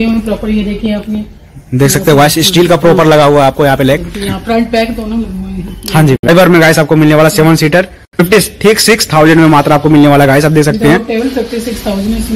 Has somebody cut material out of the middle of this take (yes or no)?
yes